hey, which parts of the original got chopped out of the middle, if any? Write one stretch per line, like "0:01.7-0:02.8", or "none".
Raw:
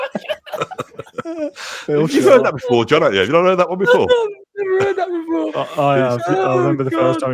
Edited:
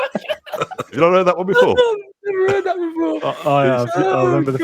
0:01.0-0:03.3